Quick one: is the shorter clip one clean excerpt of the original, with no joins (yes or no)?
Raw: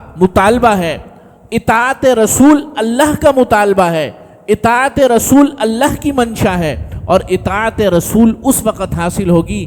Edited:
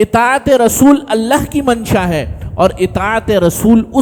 yes